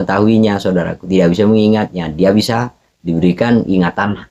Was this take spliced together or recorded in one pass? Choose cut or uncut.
uncut